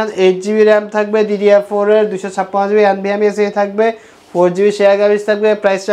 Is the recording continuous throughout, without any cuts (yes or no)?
yes